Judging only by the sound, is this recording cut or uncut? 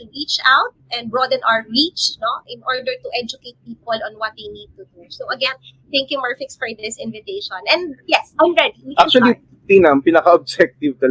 cut